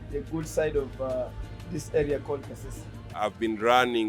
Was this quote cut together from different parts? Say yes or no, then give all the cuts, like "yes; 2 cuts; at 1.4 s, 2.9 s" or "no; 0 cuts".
yes; 1 cut; at 3.1 s